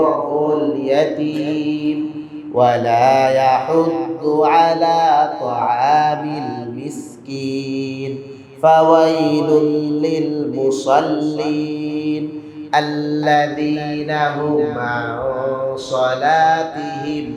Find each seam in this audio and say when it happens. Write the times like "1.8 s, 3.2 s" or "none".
none